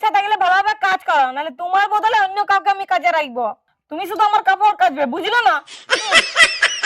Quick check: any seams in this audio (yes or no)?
yes